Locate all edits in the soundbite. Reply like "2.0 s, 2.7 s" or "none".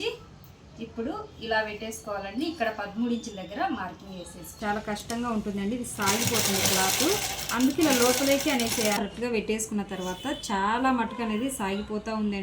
4.5 s, 9.0 s